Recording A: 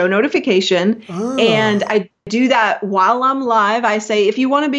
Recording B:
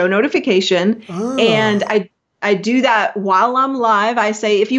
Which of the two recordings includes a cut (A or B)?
A